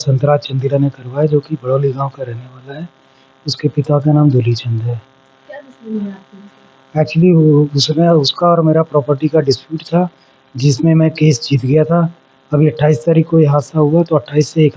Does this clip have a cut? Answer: no; 0 cuts

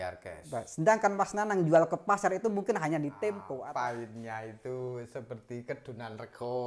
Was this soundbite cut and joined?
yes; 1 cut; at 3.5 s

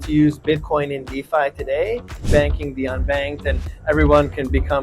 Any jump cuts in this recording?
yes; 1 cut; at 2.3 s

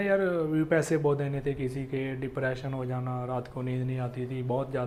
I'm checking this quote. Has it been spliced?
no; 0 cuts

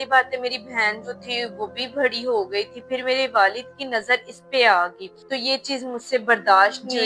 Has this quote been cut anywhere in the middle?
yes; 1 cut; at 5.1 s

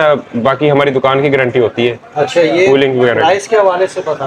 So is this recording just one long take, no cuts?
yes; 0 cuts

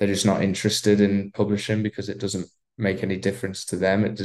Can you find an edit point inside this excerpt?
no; 0 cuts

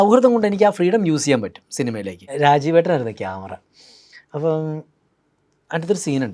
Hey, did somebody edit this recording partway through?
yes; 1 cut; at 2.3 s

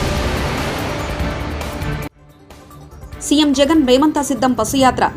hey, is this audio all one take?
no; 1 cut; at 3.0 s

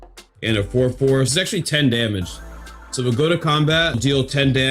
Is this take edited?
yes; 2 cuts; at 1.3 s, 4.0 s

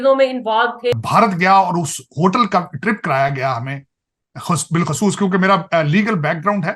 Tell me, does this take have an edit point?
yes; 1 cut; at 0.9 s

